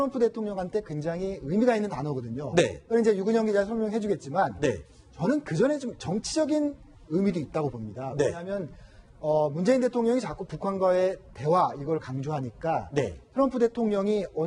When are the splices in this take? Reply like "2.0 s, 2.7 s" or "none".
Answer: none